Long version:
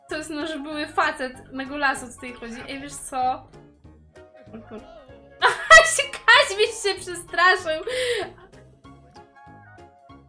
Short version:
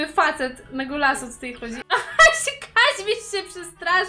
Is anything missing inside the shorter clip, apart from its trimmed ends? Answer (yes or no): yes